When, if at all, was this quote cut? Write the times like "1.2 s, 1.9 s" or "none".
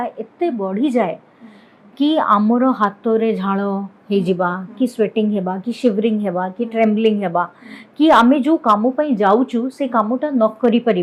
none